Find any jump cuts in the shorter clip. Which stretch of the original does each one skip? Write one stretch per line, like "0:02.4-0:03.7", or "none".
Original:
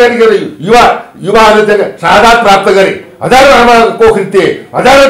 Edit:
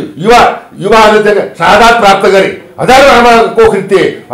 none